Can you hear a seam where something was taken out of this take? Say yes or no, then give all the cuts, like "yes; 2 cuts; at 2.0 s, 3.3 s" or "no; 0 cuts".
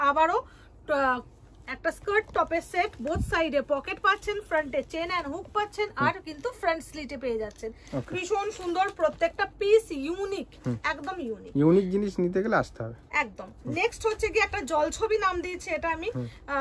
no; 0 cuts